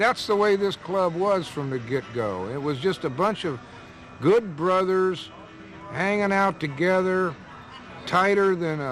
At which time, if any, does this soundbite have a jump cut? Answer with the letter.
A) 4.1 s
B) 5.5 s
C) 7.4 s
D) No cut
D